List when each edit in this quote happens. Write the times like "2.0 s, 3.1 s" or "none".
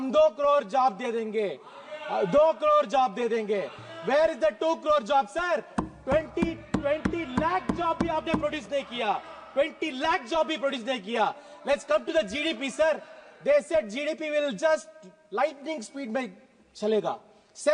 none